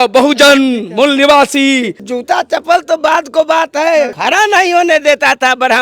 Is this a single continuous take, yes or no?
no